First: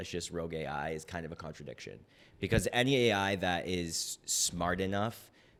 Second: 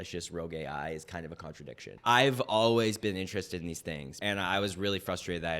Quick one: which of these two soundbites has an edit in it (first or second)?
second